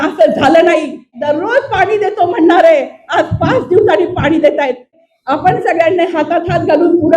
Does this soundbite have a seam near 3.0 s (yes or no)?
no